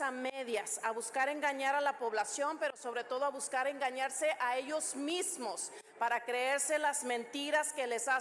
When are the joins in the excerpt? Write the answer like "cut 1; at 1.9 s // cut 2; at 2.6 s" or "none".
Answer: none